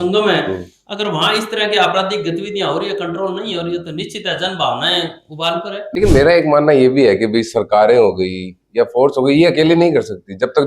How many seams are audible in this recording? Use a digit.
1